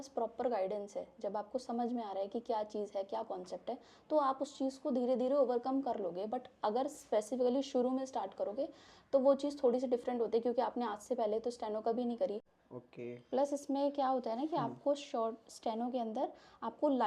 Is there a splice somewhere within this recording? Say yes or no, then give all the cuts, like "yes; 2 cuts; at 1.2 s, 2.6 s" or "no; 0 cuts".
yes; 1 cut; at 12.5 s